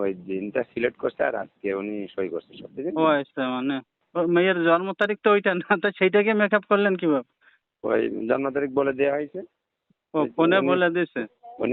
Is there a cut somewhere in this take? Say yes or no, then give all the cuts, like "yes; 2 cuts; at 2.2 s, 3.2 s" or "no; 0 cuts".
yes; 1 cut; at 4.0 s